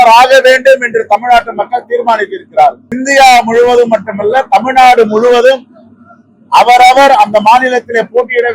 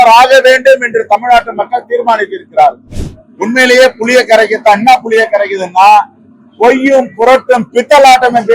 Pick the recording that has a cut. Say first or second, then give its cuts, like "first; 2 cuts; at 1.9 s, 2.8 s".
second; 1 cut; at 2.8 s